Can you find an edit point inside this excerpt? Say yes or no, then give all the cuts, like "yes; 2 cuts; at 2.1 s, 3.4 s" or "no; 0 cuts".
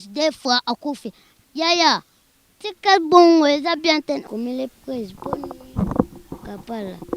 yes; 1 cut; at 4.3 s